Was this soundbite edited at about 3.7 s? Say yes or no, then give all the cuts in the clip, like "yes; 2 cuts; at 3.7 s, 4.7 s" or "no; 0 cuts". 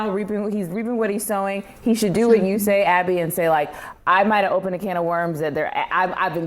no; 0 cuts